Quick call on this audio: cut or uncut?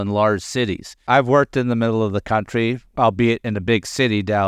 cut